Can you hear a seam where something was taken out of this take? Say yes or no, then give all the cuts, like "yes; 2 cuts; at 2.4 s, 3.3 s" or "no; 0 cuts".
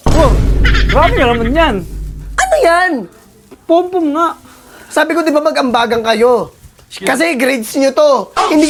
no; 0 cuts